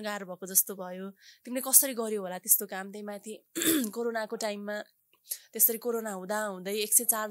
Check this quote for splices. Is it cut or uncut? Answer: uncut